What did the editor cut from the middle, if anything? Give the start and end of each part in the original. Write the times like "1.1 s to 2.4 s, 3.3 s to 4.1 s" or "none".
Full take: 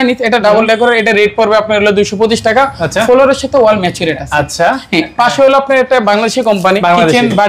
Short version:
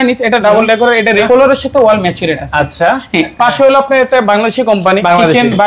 1.2 s to 3.0 s